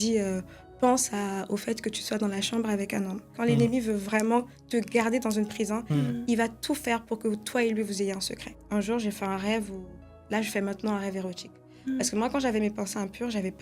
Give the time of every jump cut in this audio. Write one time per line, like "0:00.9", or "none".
0:03.3
0:08.4